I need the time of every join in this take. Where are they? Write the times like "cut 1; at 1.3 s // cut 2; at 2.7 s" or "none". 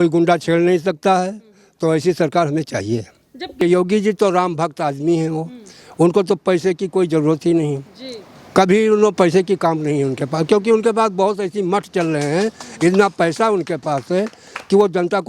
cut 1; at 3.6 s